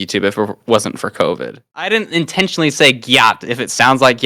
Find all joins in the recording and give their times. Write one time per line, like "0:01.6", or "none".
0:01.6

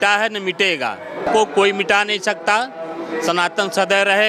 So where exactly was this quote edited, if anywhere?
0:01.2

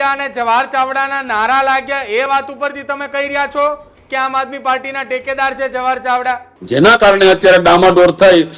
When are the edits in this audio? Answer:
0:06.5

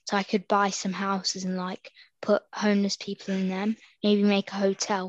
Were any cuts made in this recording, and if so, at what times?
none

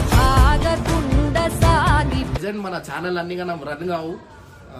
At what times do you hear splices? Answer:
0:02.3

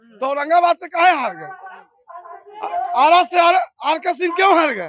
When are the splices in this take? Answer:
none

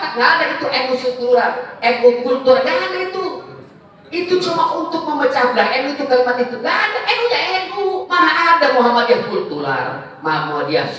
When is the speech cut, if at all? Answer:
0:08.1

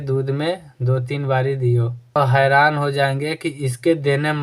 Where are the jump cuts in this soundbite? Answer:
0:02.2

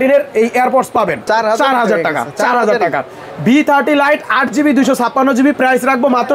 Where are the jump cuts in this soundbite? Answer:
none

